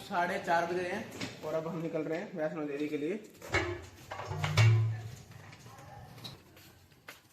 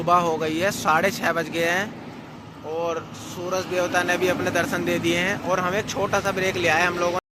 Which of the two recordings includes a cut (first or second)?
first